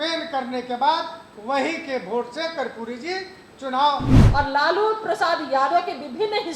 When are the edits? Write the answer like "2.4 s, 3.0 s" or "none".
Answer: 4.2 s